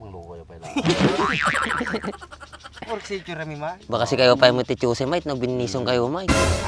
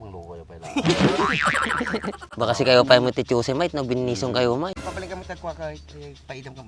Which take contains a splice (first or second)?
second